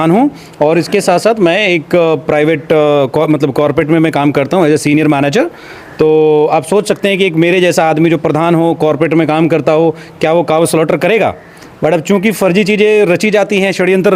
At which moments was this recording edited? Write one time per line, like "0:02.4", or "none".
none